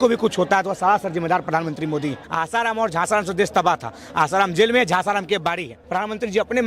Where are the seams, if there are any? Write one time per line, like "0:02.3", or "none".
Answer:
0:02.2
0:05.8